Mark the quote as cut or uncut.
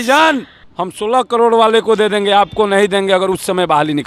uncut